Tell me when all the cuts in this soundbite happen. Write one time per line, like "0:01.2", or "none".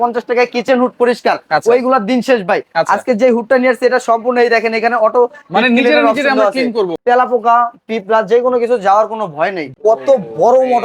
0:07.0
0:09.7